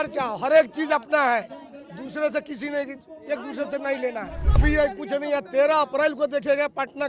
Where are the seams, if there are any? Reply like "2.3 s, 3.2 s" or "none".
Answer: 4.6 s